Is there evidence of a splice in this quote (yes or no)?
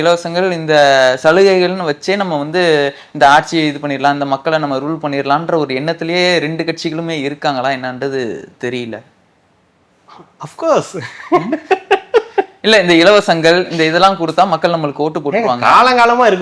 no